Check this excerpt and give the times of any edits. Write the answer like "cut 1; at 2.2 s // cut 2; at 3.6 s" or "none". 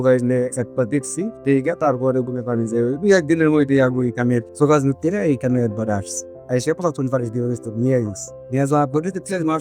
none